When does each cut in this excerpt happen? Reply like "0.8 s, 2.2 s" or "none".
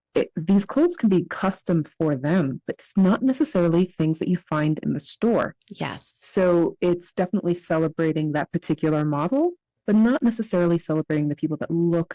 none